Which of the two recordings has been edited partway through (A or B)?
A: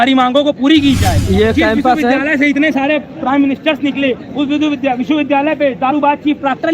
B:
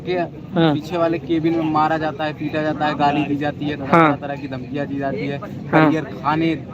A